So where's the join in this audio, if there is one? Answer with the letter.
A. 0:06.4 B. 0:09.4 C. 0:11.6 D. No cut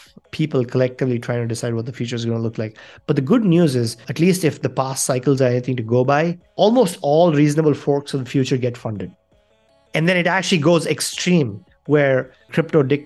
D